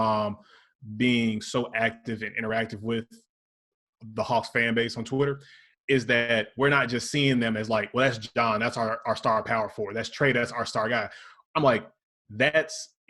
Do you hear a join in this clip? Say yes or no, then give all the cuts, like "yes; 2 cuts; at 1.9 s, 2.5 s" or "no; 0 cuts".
no; 0 cuts